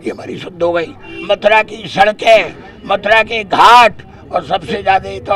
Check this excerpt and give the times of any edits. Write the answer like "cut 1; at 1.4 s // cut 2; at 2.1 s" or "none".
cut 1; at 1.0 s